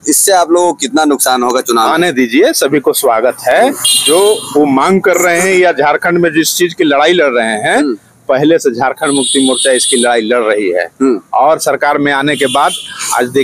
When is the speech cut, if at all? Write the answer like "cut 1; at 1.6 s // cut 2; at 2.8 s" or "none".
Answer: none